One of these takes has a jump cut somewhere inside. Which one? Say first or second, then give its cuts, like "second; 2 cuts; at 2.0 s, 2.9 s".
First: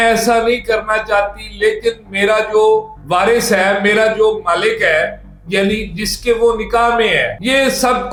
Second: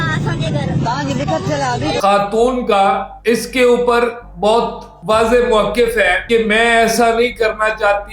second; 1 cut; at 2.0 s